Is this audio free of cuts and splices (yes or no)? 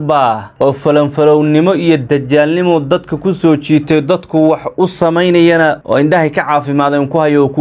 yes